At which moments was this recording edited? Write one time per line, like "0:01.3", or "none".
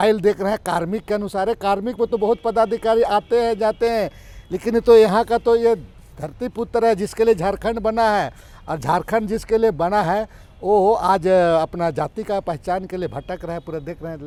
none